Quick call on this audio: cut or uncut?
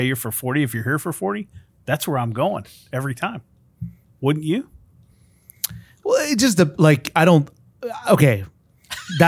uncut